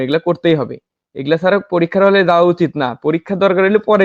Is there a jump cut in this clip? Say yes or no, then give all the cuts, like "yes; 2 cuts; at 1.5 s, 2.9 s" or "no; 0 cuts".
no; 0 cuts